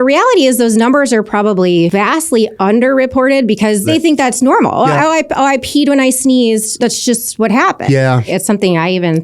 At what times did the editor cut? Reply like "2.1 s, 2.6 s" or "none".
2.5 s, 3.9 s, 6.7 s, 8.3 s